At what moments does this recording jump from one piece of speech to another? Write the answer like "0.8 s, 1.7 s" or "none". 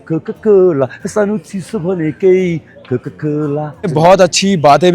3.9 s

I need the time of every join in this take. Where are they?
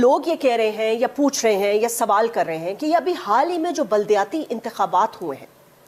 none

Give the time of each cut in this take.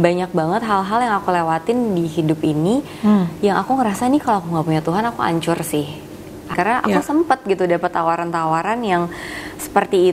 6.5 s

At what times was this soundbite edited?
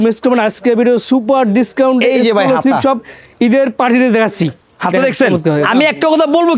none

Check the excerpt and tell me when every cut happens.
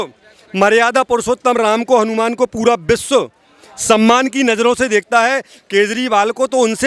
none

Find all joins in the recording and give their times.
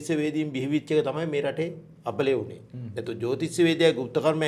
none

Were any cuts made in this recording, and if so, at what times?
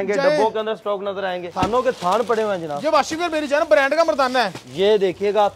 1.5 s

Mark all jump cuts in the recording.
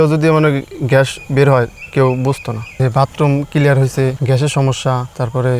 2.8 s

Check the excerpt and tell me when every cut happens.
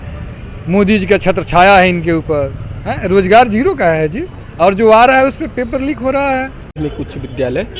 6.7 s

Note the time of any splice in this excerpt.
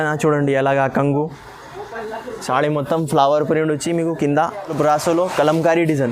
4.7 s

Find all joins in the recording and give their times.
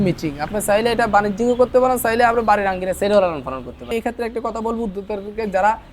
3.9 s

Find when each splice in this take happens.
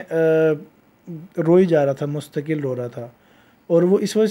none

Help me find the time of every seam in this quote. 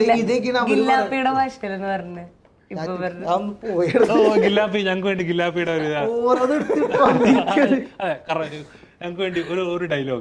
none

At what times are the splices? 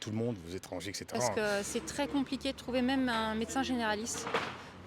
1.3 s

